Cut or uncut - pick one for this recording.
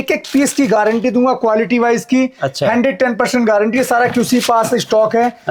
uncut